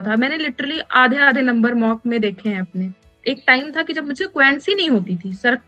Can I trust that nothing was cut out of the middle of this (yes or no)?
no